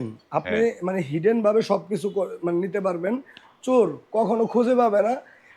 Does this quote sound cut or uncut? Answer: uncut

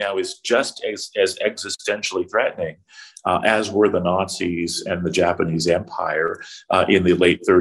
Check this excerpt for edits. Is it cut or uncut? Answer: uncut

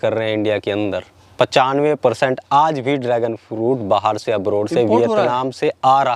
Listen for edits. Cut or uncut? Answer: uncut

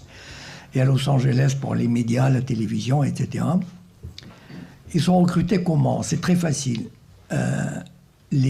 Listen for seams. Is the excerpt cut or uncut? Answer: cut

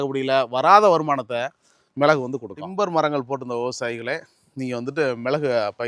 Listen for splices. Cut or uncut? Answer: cut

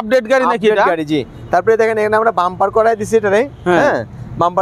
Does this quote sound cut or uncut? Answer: uncut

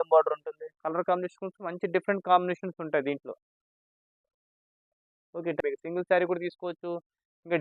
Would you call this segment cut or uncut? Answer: cut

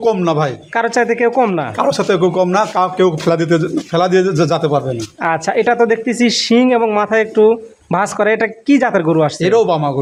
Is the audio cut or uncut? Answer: uncut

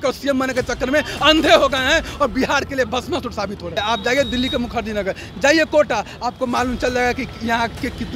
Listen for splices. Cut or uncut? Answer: cut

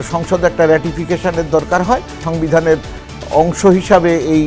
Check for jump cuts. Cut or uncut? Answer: cut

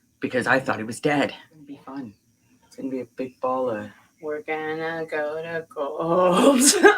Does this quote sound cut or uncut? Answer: cut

